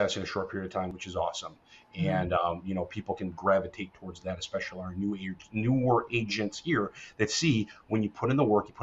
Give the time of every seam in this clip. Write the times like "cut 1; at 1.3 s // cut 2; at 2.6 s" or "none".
cut 1; at 1.0 s